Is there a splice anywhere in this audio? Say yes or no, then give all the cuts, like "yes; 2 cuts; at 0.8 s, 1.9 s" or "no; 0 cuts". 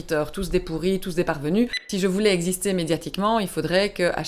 yes; 1 cut; at 1.8 s